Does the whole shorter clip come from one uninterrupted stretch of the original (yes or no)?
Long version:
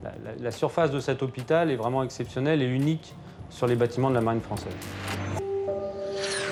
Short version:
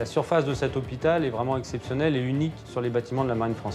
no